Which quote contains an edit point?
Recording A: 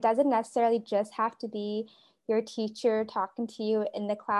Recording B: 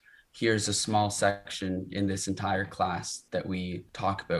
B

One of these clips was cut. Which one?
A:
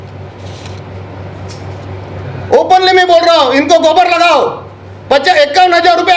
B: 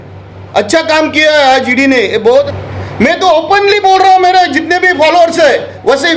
B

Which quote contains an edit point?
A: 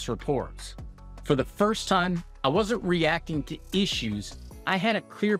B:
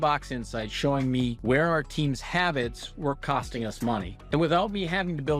B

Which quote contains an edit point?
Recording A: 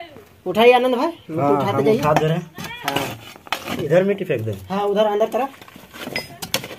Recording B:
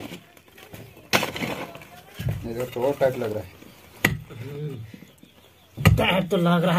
B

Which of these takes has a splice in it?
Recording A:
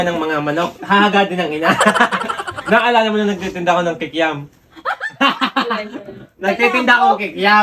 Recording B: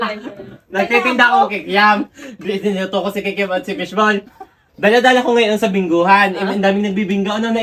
A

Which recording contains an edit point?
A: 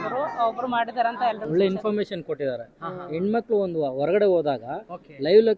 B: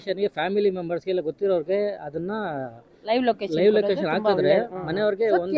A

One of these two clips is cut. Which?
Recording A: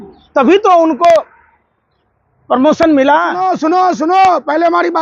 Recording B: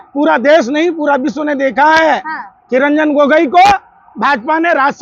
A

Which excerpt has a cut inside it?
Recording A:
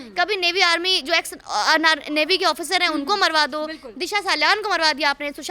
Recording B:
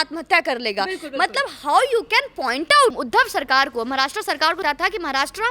B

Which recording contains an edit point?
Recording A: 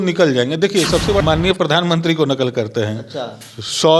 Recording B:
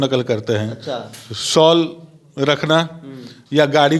A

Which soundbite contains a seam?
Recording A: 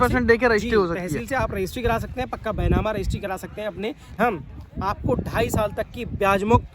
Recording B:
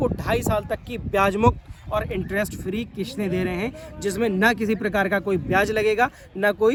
A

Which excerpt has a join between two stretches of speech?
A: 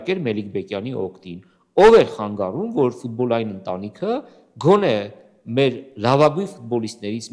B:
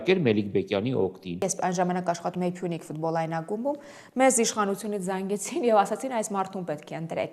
B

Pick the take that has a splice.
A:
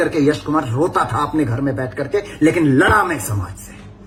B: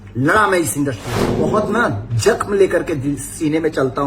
B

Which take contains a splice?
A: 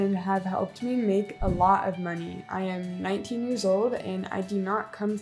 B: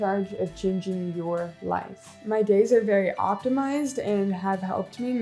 B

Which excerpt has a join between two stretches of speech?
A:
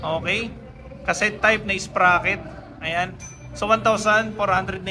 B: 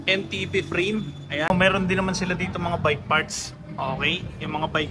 B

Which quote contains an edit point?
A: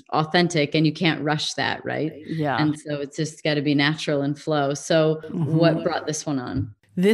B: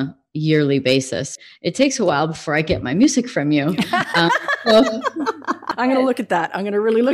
B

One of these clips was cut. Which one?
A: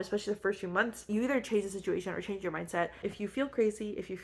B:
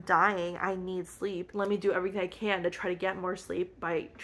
A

